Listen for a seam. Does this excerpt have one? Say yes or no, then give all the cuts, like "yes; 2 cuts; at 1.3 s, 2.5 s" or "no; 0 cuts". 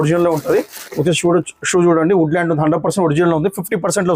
no; 0 cuts